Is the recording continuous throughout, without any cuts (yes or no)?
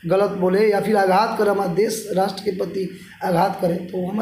yes